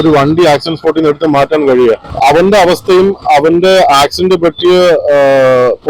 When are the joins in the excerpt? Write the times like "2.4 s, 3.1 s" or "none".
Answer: 2.1 s